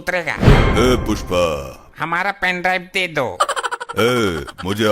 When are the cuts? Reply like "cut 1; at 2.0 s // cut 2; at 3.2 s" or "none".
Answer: cut 1; at 1.8 s